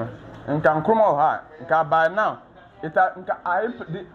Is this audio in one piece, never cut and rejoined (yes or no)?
yes